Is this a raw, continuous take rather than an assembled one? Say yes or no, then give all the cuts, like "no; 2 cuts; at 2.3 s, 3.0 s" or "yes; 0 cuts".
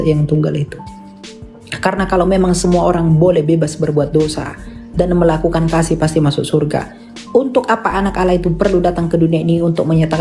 yes; 0 cuts